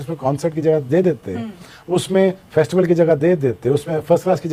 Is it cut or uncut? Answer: uncut